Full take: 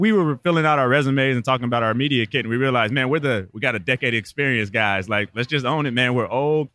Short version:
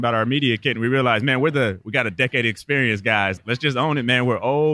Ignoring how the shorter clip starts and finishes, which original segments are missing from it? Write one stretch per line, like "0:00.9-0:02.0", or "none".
0:05.1-0:05.3